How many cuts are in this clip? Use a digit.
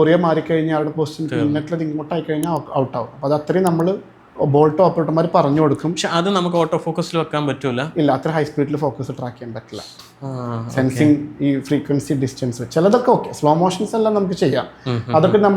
0